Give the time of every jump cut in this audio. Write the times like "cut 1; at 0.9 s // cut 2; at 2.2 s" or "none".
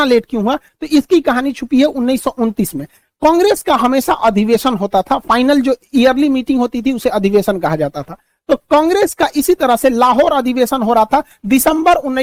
none